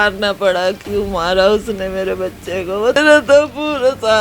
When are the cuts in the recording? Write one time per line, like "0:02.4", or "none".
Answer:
0:03.0